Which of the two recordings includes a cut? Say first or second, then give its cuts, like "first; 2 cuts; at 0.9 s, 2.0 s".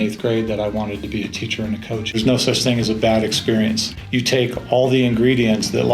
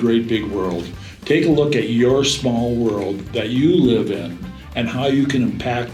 first; 2 cuts; at 2.1 s, 3.9 s